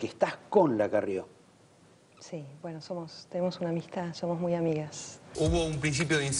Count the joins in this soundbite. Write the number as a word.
one